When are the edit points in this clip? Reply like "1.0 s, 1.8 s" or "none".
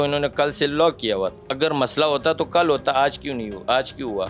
1.4 s